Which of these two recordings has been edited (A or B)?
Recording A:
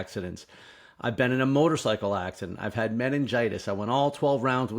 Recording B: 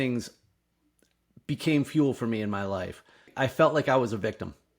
B